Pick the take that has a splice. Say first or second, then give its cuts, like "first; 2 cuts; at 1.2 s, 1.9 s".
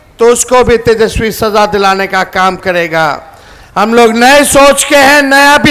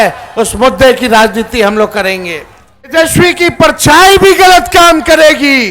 second; 1 cut; at 2.9 s